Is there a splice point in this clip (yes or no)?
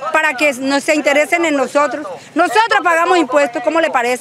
no